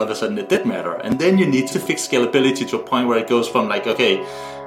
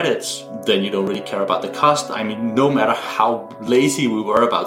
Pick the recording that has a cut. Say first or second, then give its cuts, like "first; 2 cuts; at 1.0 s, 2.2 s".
first; 1 cut; at 1.7 s